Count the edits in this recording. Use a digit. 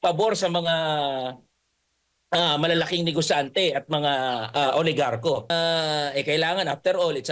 1